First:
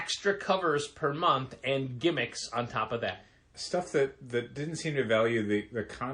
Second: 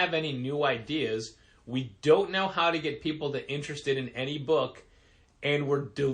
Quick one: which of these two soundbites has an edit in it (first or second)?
first